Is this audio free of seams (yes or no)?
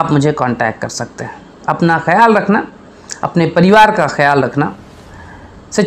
yes